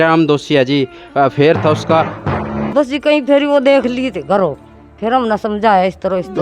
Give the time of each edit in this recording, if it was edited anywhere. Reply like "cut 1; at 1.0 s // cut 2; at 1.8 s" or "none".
cut 1; at 2.1 s